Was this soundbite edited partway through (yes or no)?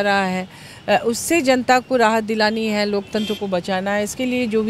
no